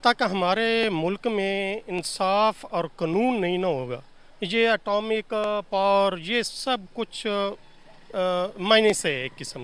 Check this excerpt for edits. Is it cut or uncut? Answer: uncut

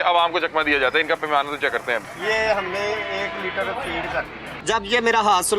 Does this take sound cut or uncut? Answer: cut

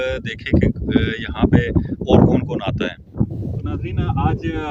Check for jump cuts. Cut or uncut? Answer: cut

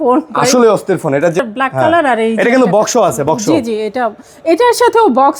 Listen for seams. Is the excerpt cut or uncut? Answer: cut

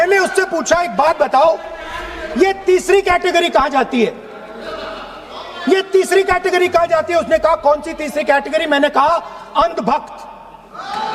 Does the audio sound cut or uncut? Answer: uncut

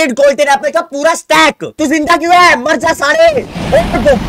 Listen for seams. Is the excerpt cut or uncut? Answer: cut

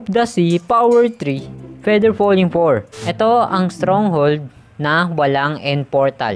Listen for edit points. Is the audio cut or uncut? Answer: cut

